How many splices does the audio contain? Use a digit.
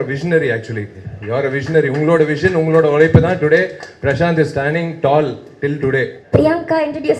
1